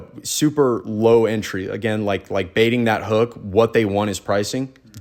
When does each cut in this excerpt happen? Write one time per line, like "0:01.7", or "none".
none